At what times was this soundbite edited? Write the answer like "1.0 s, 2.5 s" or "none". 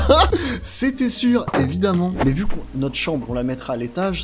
2.2 s